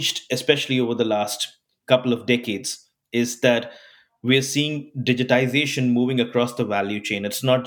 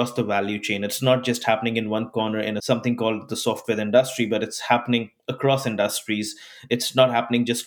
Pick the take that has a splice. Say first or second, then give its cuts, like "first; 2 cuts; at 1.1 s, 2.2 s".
second; 1 cut; at 2.6 s